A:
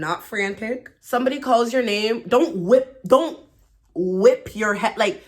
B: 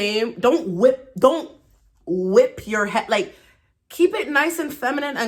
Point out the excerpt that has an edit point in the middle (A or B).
A